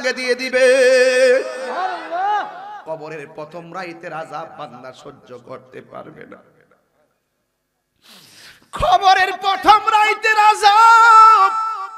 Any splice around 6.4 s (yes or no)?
no